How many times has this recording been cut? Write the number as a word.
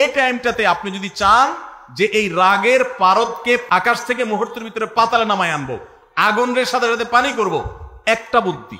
one